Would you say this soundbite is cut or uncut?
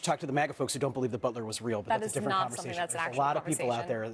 uncut